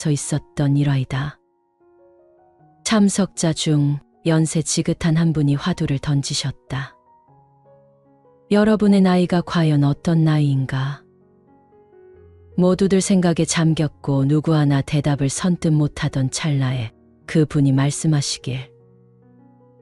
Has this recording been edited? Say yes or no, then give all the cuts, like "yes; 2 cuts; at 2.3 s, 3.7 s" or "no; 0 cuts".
no; 0 cuts